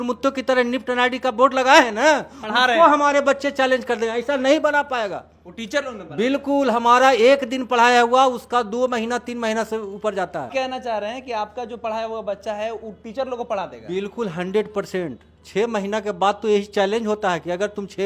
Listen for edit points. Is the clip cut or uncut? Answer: uncut